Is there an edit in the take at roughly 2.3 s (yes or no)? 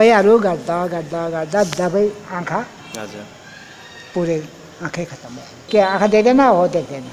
no